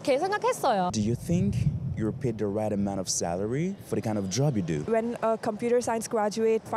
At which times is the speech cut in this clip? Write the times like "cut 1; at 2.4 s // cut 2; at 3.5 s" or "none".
cut 1; at 0.9 s // cut 2; at 3.8 s // cut 3; at 4.8 s